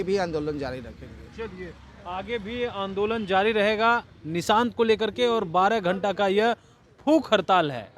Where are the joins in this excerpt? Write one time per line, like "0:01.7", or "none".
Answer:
none